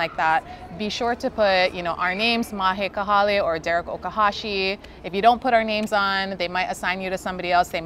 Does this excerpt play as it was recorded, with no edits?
yes; 0 cuts

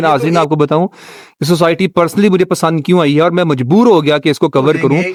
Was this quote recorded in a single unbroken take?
yes; 0 cuts

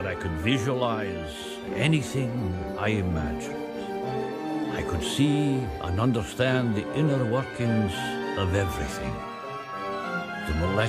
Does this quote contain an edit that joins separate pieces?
yes; 1 cut; at 5.7 s

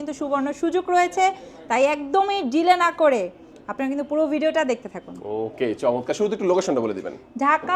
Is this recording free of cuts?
yes; 0 cuts

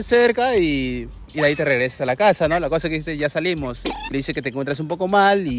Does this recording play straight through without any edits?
yes; 0 cuts

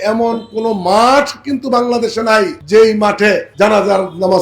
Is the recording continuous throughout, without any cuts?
no; 2 cuts; at 2.6 s, 3.5 s

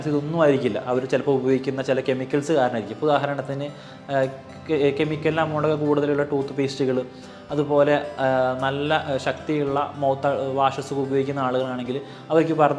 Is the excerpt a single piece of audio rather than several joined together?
yes; 0 cuts

